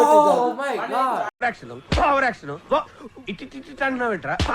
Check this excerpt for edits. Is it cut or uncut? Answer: cut